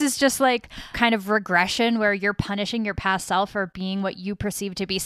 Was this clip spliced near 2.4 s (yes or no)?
no